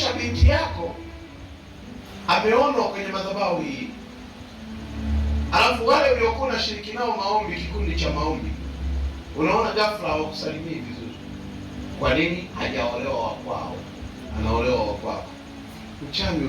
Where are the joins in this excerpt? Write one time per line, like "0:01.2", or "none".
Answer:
0:02.0
0:14.3

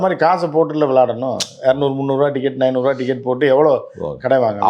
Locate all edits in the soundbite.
none

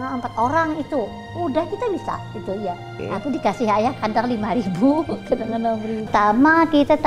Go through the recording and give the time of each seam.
0:02.9
0:06.1

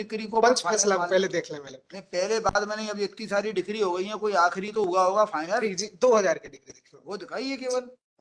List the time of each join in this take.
none

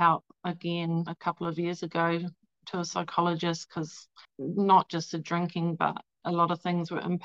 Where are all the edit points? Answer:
0:04.2
0:06.2

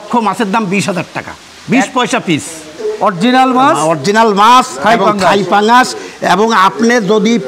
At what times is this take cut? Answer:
none

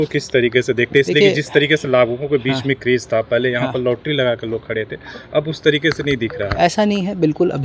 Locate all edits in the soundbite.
none

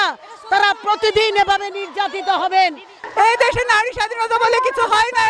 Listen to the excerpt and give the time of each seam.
0:03.0

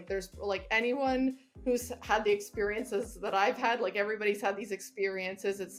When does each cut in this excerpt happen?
none

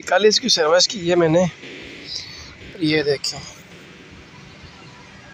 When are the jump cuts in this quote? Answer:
none

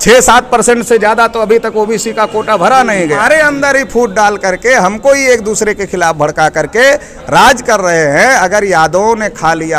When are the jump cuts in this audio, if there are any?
0:03.2

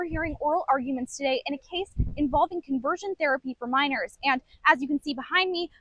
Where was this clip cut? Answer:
none

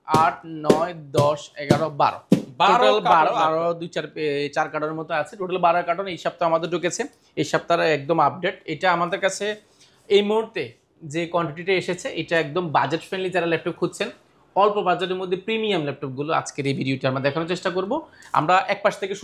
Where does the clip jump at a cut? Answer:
none

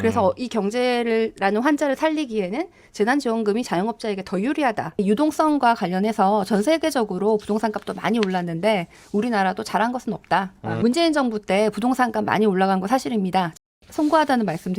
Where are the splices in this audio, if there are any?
0:05.0
0:10.8
0:13.5

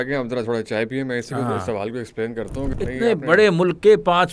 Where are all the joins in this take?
0:02.7

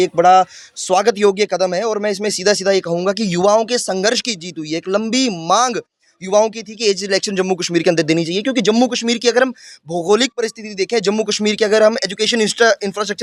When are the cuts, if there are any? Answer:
none

